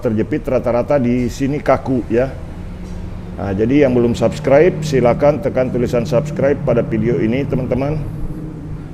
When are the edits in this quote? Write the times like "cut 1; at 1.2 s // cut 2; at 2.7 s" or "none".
none